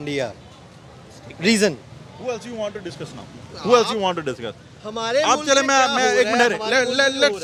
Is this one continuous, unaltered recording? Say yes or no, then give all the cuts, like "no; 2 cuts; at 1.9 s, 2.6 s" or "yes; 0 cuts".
yes; 0 cuts